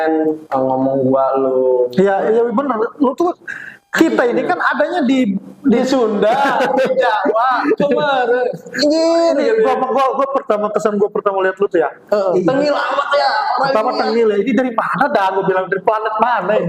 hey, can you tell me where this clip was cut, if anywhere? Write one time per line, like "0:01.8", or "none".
none